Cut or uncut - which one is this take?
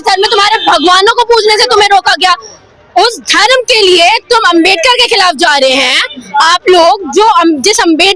uncut